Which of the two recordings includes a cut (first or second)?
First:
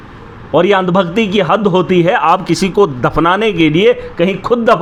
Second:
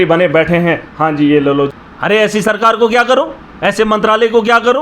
second